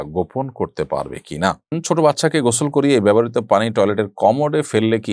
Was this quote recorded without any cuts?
no; 1 cut; at 1.6 s

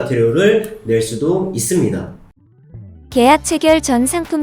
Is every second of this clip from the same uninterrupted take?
no; 1 cut; at 2.4 s

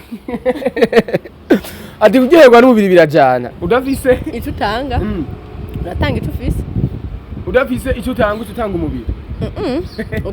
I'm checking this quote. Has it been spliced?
yes; 1 cut; at 3.5 s

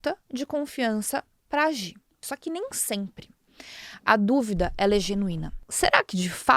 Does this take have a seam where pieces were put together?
yes; 2 cuts; at 2.3 s, 5.6 s

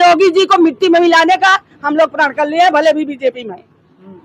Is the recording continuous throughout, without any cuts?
yes; 0 cuts

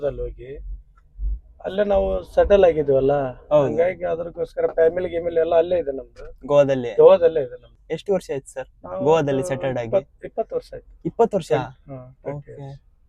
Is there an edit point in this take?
no; 0 cuts

